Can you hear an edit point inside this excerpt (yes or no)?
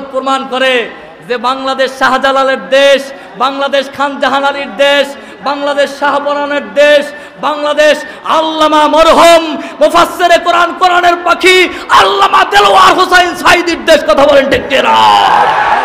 no